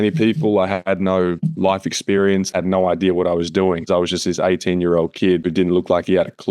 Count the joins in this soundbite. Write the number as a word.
three